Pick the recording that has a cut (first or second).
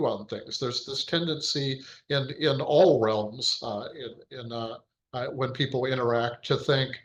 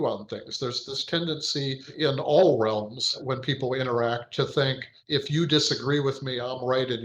second